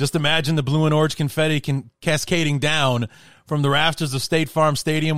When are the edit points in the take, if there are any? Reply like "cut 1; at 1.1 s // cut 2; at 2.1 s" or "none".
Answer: none